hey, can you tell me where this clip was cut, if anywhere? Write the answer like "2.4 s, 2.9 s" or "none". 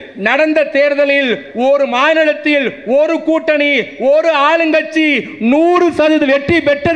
none